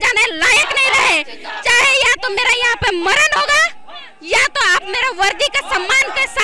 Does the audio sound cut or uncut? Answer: uncut